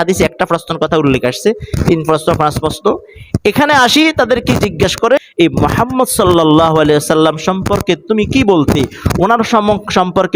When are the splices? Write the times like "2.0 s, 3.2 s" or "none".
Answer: 5.2 s